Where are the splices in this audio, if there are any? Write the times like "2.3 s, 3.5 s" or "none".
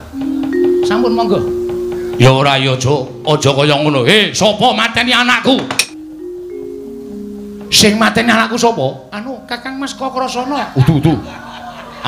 5.8 s